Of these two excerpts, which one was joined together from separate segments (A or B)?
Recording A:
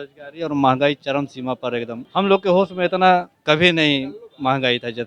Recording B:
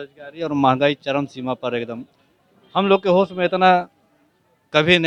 A